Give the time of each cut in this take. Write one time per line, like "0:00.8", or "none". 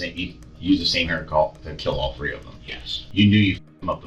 0:03.0